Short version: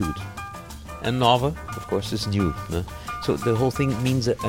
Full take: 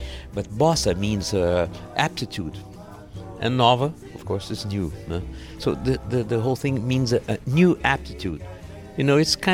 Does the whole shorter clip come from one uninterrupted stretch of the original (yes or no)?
no